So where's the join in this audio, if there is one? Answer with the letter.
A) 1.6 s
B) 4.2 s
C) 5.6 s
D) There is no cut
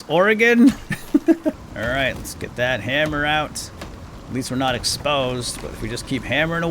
A